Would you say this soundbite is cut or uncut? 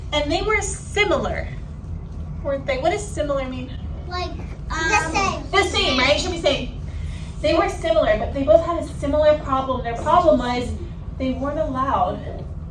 uncut